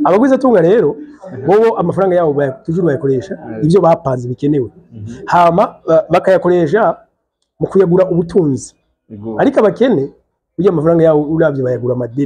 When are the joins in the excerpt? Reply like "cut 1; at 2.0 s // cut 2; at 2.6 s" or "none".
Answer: none